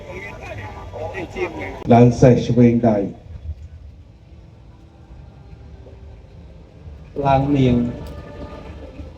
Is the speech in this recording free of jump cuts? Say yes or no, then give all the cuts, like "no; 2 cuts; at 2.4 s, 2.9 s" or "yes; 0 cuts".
no; 1 cut; at 1.8 s